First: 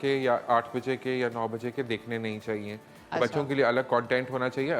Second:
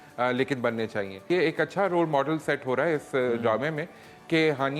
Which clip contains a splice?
second; 1 cut; at 1.2 s

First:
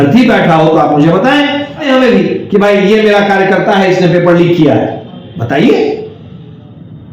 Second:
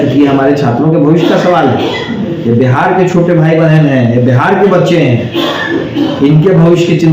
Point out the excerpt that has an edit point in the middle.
first; 1 cut; at 1.8 s

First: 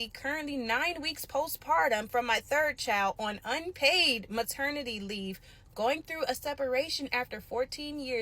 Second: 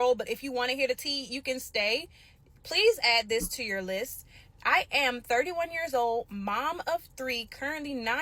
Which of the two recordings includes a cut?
first; 1 cut; at 4.2 s

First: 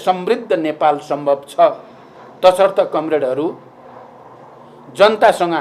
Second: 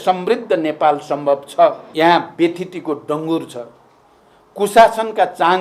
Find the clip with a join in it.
second; 1 cut; at 1.8 s

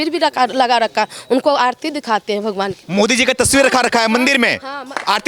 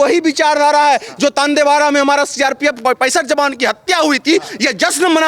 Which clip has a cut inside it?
second; 1 cut; at 2.8 s

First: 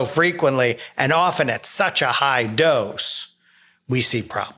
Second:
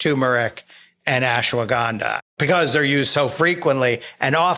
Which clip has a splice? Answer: second; 1 cut; at 2.2 s

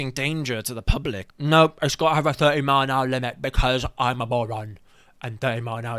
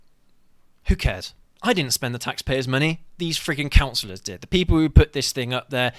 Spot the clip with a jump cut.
first; 1 cut; at 1.2 s

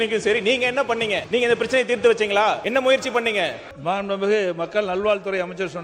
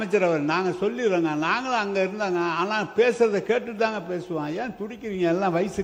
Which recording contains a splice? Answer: first; 3 cuts; at 1.2 s, 2.6 s, 3.7 s

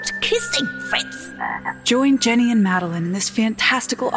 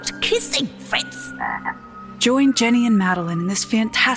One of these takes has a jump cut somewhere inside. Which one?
first; 1 cut; at 1.7 s

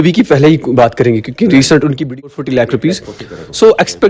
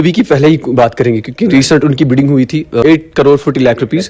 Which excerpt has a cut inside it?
first; 1 cut; at 2.3 s

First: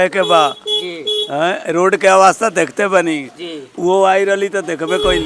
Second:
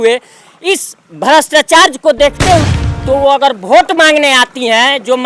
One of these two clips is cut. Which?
second; 1 cut; at 2.6 s

